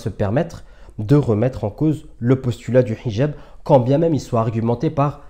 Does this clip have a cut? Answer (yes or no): no